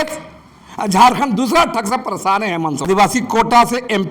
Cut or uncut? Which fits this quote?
cut